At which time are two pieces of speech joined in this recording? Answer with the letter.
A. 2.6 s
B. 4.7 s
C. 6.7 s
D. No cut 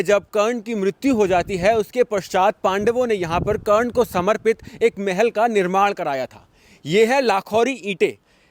D